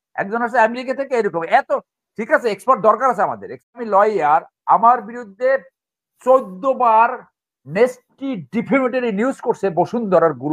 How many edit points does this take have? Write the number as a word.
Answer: one